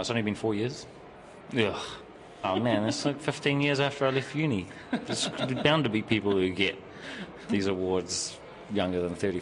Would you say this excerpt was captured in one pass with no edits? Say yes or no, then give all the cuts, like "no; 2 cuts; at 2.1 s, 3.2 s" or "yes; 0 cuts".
no; 1 cut; at 2.5 s